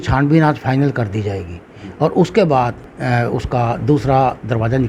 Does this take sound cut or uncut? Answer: cut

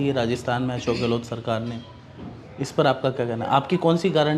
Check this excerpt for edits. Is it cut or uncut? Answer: uncut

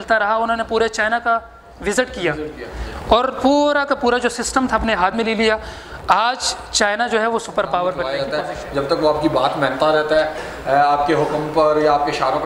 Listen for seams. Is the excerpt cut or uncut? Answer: cut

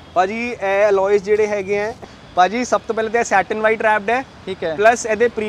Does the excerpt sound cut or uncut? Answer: cut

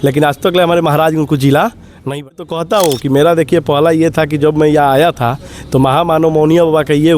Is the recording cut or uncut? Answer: cut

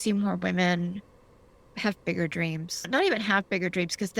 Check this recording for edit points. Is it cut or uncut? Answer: cut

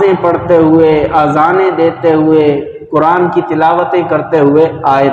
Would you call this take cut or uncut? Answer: uncut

